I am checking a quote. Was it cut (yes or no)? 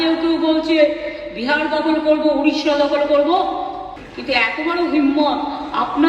yes